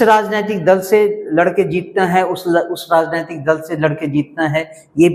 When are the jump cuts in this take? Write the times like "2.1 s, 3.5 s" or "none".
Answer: none